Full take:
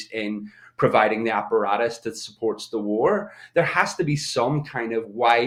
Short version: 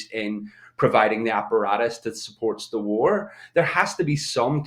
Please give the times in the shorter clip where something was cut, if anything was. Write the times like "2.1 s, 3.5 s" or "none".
none